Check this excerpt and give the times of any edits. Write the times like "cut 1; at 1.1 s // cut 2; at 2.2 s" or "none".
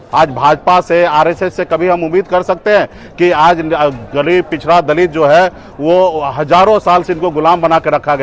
none